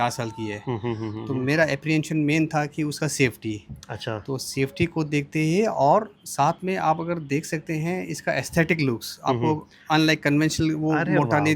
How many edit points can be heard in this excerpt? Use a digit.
0